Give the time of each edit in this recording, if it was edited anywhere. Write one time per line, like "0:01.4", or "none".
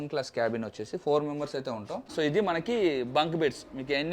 0:02.1